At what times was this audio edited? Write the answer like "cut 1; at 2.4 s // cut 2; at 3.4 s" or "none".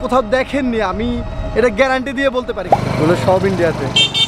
cut 1; at 2.7 s